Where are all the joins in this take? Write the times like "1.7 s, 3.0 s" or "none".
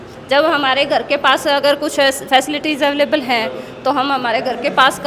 none